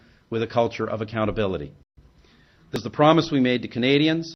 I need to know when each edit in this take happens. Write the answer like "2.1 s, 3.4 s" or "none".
none